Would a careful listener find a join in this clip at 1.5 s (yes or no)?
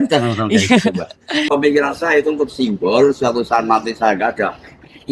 yes